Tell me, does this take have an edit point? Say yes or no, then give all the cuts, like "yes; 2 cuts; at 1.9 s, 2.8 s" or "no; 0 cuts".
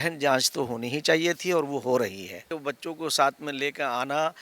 yes; 1 cut; at 2.5 s